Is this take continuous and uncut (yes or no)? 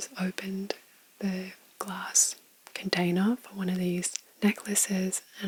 yes